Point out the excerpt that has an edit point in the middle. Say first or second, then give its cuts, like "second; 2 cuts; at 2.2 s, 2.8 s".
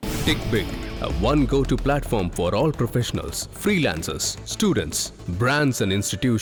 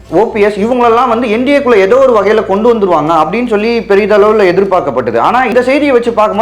second; 1 cut; at 5.5 s